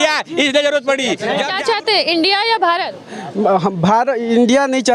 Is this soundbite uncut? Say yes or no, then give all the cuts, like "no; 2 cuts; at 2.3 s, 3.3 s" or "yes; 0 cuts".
no; 1 cut; at 1.5 s